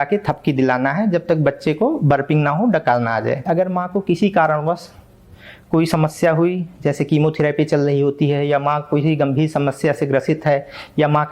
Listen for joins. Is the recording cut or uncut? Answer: cut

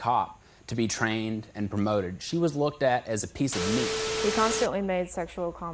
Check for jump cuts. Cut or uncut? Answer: cut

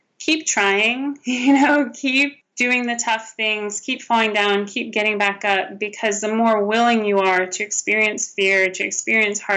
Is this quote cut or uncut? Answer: cut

